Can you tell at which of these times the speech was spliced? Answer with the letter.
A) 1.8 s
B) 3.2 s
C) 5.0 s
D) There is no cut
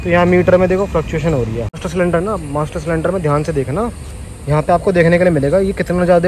A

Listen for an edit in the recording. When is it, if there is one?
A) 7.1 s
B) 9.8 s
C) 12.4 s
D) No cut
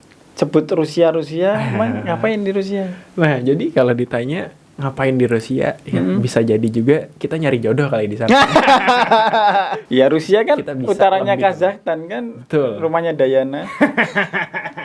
B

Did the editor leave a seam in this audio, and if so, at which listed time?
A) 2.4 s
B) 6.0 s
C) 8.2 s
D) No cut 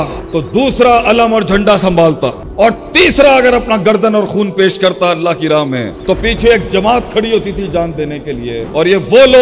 A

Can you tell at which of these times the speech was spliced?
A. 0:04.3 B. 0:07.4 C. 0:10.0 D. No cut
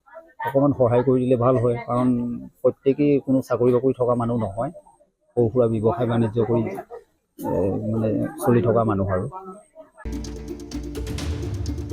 C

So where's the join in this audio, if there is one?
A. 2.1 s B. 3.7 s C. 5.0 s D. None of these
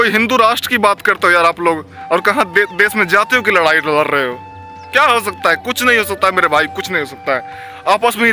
D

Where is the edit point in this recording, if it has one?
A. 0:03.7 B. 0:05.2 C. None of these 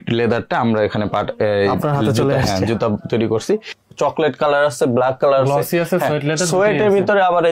A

